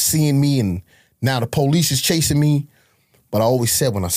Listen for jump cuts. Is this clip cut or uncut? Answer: uncut